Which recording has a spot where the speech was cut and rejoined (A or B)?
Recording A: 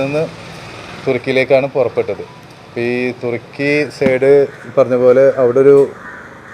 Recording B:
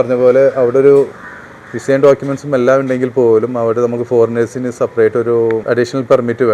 B